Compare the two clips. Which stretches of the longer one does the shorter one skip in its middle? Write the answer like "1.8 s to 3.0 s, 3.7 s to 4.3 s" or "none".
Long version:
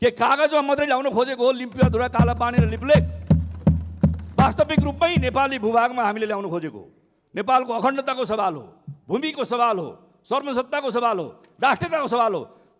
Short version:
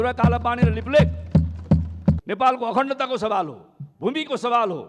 4.2 s to 7.3 s

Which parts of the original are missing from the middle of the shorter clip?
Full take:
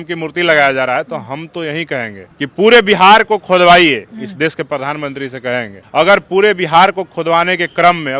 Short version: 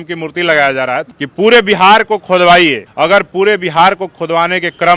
1.1 s to 2.3 s, 4.0 s to 5.8 s

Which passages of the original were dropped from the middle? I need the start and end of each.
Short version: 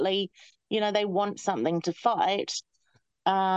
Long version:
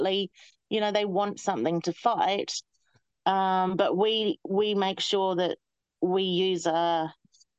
none

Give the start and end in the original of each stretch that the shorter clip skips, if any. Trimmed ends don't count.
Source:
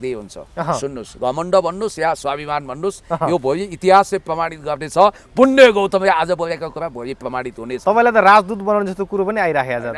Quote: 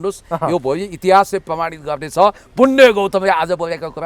none

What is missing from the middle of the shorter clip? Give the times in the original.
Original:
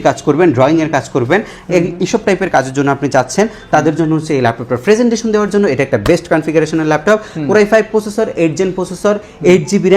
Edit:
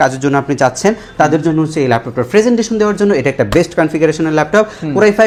none

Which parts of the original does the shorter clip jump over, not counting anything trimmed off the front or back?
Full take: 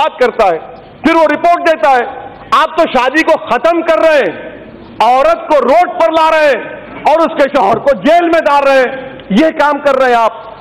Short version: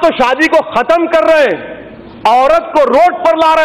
none

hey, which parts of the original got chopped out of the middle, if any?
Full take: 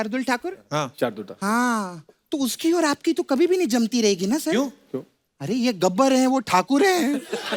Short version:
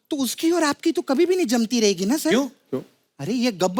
none

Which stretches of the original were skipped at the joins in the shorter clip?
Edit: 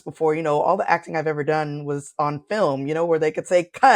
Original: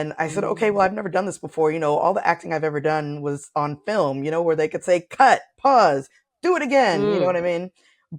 none

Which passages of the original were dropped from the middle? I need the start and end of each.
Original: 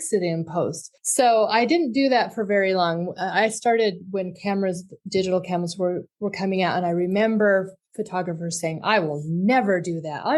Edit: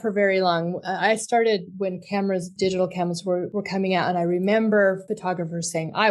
4.8 s to 5.0 s, 6.0 s to 6.2 s, 7.8 s to 8.0 s

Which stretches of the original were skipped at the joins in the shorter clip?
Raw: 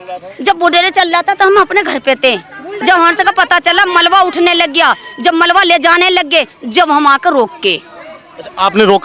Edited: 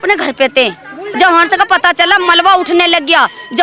none

